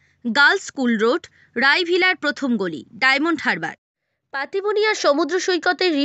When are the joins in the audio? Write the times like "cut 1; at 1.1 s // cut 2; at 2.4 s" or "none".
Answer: cut 1; at 3.8 s